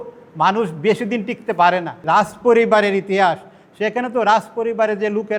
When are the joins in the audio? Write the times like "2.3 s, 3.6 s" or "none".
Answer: 2.0 s